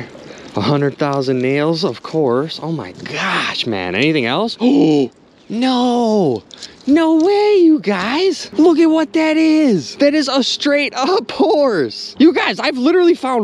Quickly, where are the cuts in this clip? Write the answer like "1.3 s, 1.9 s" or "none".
none